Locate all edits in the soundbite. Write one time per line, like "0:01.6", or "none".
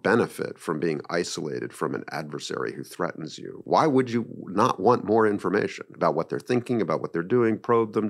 0:03.5